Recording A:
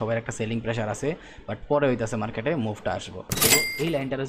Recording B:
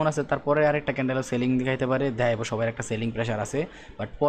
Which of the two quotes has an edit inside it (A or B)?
A